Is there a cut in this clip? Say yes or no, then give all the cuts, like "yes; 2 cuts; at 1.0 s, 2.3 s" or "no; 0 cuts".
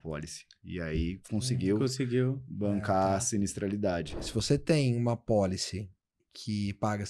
yes; 1 cut; at 4.3 s